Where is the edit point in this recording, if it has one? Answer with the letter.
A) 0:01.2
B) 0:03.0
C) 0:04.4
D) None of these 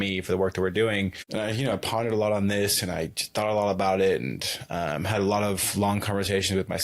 A